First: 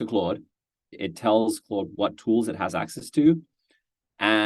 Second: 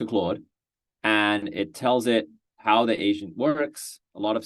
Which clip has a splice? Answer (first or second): first